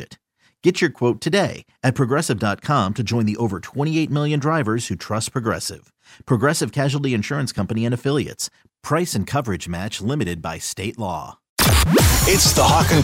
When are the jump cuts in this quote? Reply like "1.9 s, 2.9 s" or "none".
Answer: 11.5 s